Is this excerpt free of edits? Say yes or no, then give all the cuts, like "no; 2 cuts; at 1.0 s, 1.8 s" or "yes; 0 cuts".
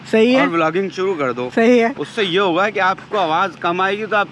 yes; 0 cuts